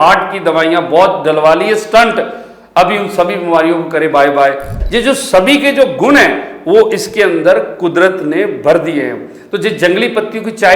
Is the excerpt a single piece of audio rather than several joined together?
no; 1 cut; at 4.8 s

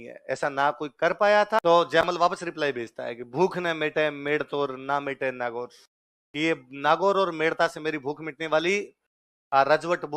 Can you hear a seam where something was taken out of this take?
yes; 1 cut; at 1.6 s

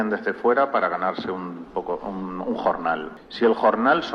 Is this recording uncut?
yes; 0 cuts

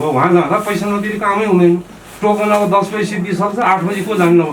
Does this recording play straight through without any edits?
yes; 0 cuts

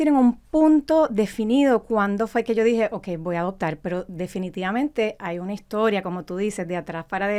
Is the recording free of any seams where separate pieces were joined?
yes; 0 cuts

